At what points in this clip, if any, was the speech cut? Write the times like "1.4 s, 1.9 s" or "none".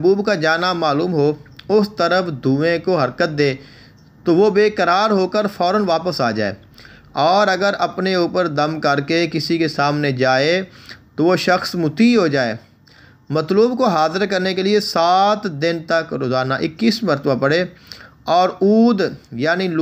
none